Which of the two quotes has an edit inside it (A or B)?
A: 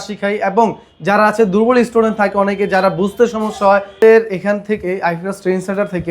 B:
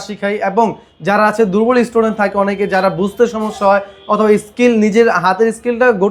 A